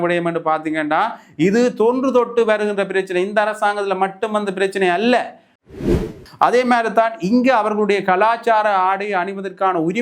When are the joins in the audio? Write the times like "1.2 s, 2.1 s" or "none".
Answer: 5.7 s